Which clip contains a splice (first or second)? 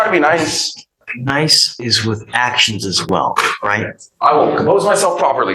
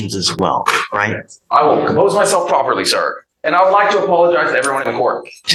first